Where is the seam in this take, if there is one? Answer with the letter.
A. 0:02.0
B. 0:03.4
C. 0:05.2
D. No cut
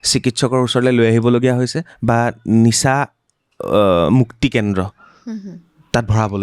D